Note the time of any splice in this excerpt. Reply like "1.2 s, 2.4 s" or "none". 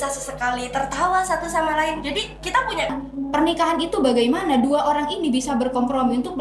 2.9 s